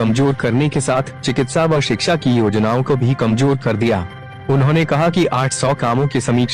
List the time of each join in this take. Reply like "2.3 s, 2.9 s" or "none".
none